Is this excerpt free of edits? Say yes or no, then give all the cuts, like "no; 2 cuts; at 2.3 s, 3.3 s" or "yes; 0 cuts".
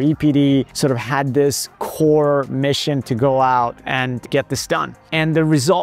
yes; 0 cuts